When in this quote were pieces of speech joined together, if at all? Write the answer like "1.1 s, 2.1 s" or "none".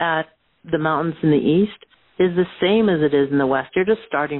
none